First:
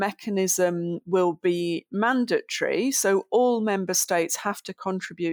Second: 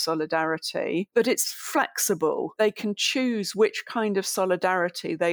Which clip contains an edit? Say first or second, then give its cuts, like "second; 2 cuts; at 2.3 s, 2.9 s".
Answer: second; 2 cuts; at 1.1 s, 2.5 s